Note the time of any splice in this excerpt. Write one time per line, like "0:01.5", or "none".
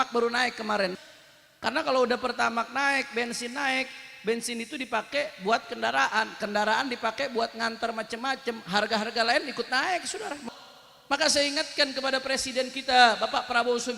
0:00.9
0:10.3